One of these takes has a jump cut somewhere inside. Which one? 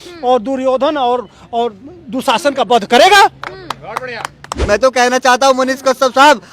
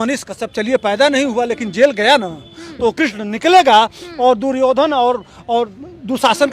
first; 1 cut; at 4.6 s

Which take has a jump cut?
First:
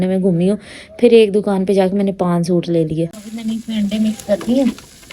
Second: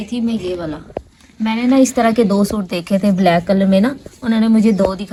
first; 1 cut; at 3.2 s

